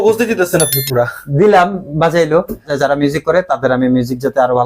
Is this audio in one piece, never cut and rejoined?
no; 1 cut; at 2.7 s

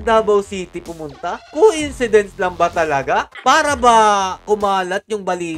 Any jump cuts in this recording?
yes; 1 cut; at 3.3 s

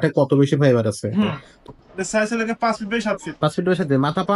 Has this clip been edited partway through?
yes; 1 cut; at 1.5 s

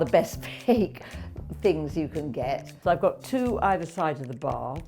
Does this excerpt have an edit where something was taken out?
yes; 1 cut; at 2.7 s

